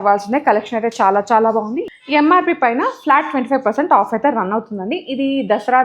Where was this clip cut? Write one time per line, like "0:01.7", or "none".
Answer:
0:01.8